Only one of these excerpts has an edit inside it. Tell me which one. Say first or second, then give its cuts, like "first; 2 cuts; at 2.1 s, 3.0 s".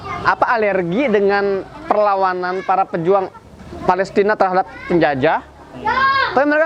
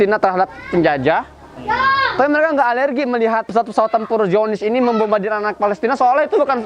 second; 1 cut; at 3.5 s